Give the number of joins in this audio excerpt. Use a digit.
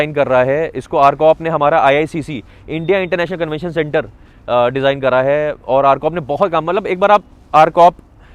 0